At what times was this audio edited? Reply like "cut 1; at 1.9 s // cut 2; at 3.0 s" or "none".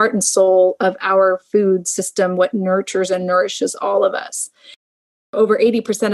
cut 1; at 4.9 s

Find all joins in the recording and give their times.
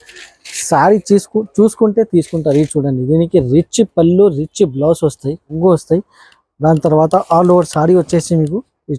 cut 1; at 5.5 s

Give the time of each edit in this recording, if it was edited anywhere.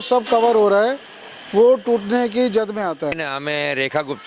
cut 1; at 3.2 s

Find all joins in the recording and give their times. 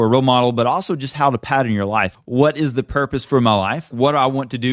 cut 1; at 2.2 s

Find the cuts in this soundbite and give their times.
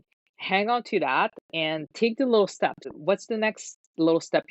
cut 1; at 2.9 s

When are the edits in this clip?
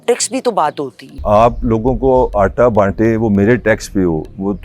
cut 1; at 1.1 s

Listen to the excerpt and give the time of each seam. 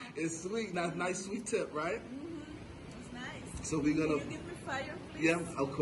none

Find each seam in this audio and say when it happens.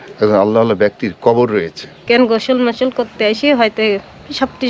cut 1; at 2.0 s

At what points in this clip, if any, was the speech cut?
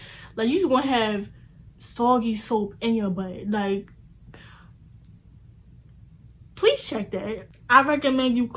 cut 1; at 7.4 s

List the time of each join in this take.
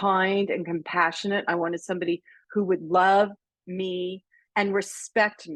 none

